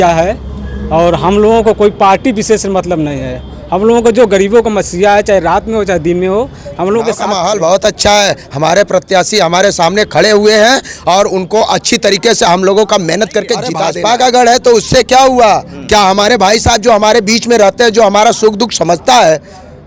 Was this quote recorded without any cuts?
no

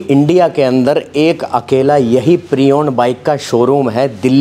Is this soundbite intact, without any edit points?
yes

